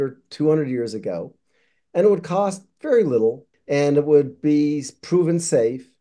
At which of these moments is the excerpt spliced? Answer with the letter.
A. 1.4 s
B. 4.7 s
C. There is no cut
C